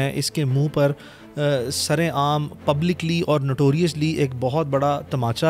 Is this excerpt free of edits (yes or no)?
yes